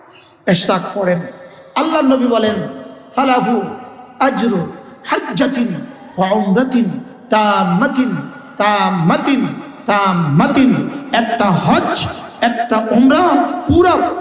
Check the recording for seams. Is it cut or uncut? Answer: uncut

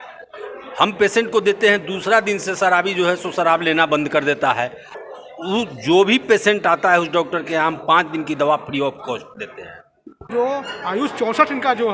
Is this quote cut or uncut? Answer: cut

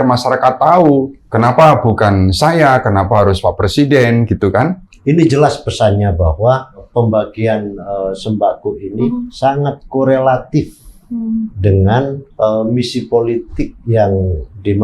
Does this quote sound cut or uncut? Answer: cut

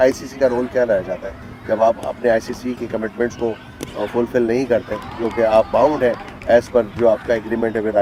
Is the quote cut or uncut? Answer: uncut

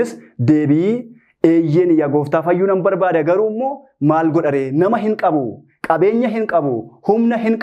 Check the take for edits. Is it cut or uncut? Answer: uncut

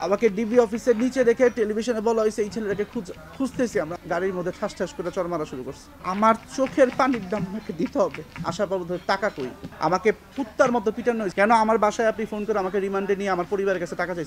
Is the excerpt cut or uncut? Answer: cut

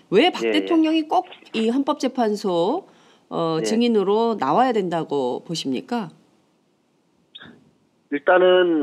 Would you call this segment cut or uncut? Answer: uncut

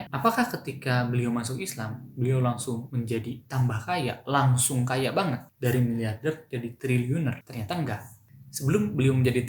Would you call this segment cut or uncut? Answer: uncut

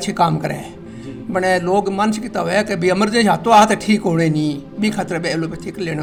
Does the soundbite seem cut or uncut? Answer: uncut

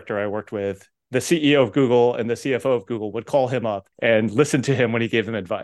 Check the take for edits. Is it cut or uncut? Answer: cut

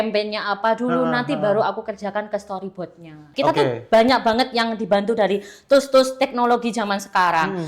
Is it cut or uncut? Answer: cut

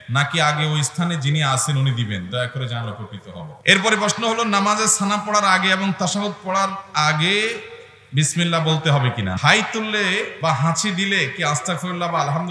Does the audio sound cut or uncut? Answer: cut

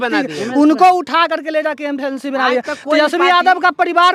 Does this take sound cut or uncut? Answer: uncut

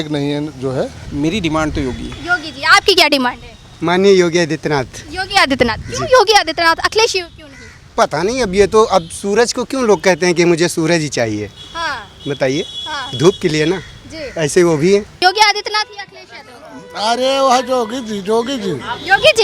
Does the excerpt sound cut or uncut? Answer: cut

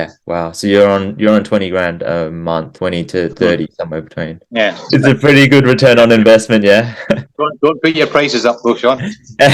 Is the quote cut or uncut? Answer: uncut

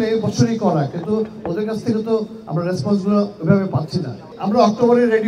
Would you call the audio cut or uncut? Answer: cut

